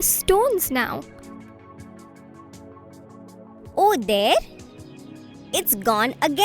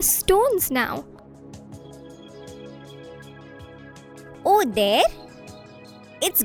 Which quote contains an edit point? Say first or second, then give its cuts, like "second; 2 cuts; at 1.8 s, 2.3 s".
first; 2 cuts; at 1.0 s, 3.0 s